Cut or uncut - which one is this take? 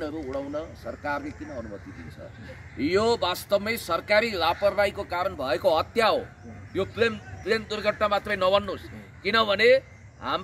uncut